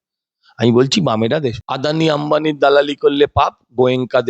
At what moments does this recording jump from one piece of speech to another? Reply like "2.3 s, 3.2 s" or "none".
1.7 s